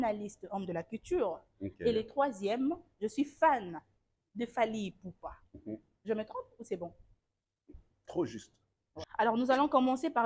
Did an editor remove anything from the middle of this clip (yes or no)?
yes